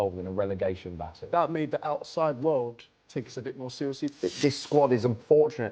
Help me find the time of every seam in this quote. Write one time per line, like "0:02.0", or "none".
0:01.3
0:04.1